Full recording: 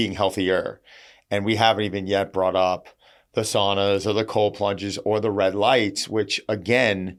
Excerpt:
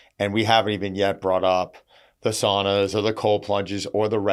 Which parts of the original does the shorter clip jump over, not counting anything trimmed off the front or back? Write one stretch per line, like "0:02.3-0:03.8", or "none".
none